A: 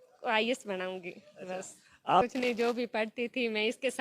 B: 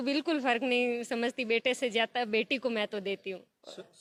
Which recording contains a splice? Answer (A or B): A